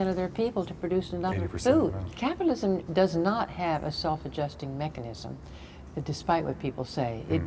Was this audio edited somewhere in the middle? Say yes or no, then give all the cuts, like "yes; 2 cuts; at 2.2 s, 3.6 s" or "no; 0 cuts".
yes; 1 cut; at 2.1 s